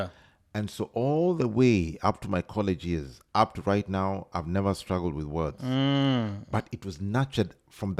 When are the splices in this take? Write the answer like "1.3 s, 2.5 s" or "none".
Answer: none